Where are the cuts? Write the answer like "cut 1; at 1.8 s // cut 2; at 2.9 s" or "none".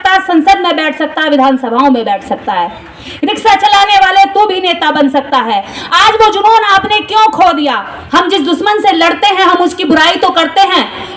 cut 1; at 7.9 s